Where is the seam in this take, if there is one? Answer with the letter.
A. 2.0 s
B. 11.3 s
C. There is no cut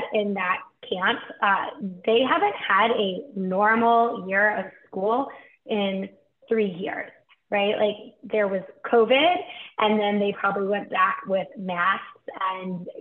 C